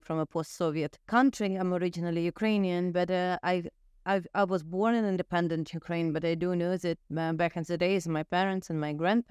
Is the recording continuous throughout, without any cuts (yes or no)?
no